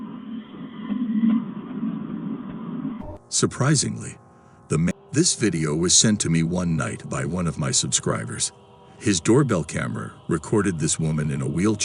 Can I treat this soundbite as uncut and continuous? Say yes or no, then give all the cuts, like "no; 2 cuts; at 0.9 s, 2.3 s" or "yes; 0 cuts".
no; 1 cut; at 4.9 s